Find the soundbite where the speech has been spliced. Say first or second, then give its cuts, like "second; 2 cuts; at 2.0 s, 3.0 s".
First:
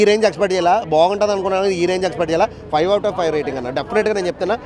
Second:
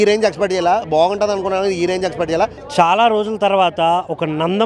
second; 1 cut; at 2.6 s